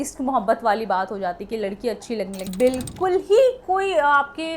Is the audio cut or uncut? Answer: cut